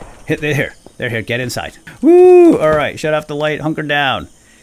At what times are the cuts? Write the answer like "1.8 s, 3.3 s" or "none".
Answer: 1.8 s